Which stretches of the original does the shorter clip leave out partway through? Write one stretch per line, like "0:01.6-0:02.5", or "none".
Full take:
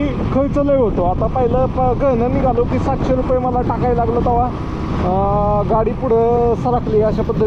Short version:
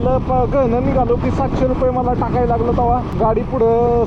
0:04.6-0:05.7

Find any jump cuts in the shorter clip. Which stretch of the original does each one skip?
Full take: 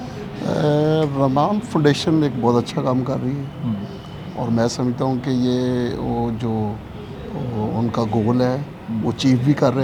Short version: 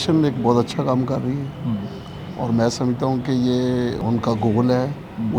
0:06.0-0:07.7

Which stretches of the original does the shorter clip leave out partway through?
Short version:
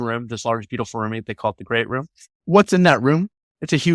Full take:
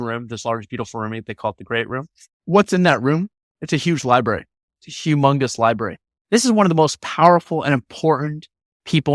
none

